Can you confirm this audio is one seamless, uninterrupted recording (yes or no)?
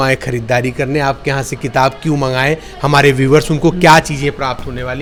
yes